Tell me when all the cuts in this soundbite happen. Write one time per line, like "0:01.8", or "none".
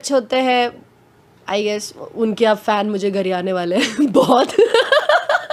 none

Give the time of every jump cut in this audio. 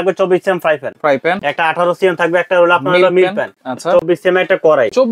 none

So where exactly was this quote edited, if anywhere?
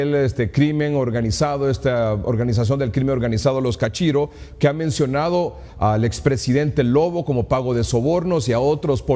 0:07.2

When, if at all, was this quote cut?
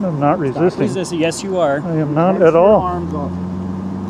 none

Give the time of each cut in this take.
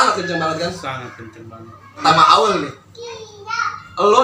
0:02.0

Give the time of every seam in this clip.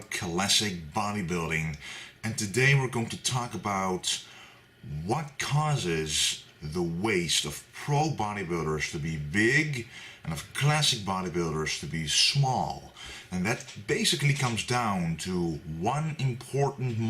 0:13.4

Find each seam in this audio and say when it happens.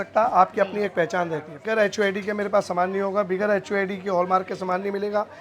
0:01.7

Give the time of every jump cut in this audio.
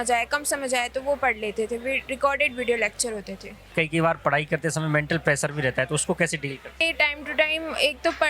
0:03.7
0:06.8

